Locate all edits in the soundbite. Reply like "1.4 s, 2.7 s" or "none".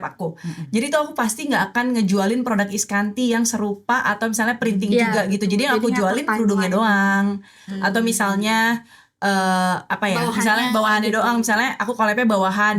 none